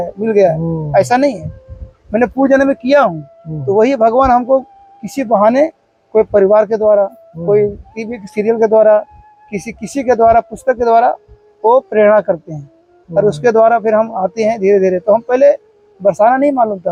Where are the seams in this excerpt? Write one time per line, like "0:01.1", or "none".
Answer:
none